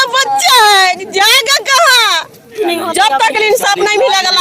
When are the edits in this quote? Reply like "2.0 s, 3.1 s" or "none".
2.6 s